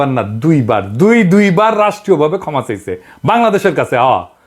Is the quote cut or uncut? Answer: uncut